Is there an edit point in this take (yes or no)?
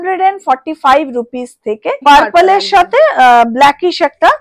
yes